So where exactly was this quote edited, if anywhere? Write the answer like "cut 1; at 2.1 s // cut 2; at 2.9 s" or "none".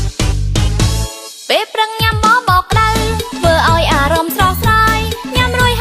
cut 1; at 1.2 s